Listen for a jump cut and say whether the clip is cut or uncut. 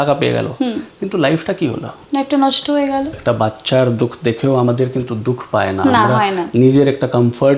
cut